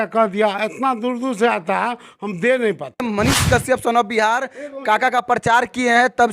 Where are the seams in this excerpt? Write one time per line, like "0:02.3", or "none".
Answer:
0:03.1